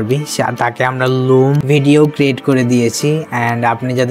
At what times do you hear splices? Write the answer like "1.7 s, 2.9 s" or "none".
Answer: 1.6 s